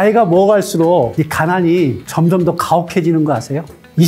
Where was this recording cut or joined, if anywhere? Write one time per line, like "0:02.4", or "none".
none

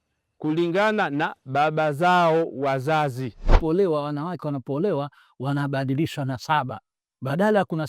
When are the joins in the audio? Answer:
0:03.6

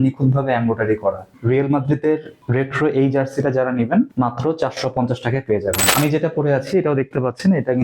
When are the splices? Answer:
0:01.3
0:02.4
0:04.1
0:05.9

